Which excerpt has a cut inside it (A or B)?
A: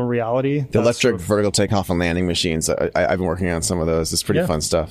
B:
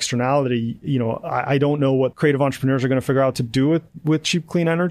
B